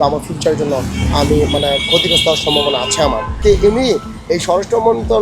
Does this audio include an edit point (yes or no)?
yes